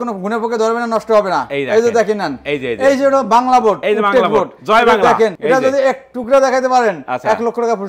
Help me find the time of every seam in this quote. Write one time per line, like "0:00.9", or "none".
none